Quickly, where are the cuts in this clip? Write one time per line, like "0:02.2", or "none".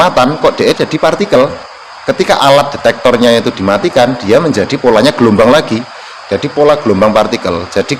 none